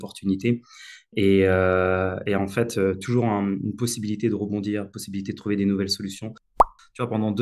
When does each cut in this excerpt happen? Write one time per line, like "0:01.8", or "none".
0:06.5